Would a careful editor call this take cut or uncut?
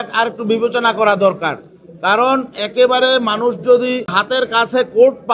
cut